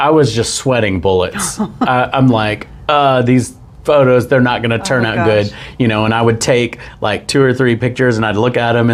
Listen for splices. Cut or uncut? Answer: uncut